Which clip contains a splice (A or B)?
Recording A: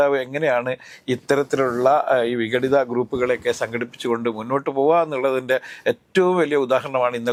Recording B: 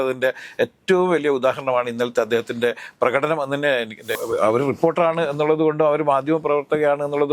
B